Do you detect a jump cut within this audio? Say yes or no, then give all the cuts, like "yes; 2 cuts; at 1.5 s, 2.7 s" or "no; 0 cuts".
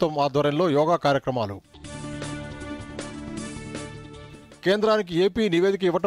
no; 0 cuts